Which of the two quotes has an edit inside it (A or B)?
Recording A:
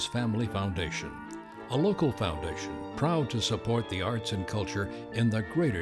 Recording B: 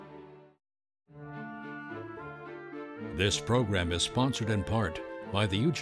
B